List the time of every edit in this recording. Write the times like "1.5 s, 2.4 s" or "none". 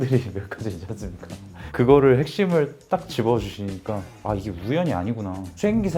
4.1 s